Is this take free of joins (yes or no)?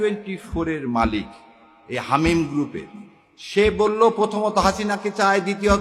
yes